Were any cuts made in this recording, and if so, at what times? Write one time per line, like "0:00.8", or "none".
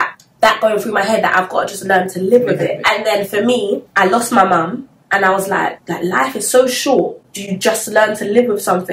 none